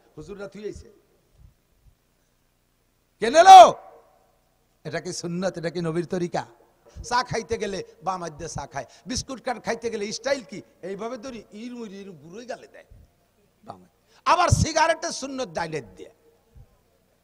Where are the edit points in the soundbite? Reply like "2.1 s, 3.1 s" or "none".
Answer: 7.0 s